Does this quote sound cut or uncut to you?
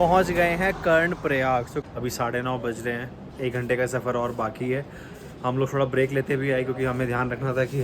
cut